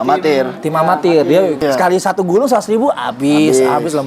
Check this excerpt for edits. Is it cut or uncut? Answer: cut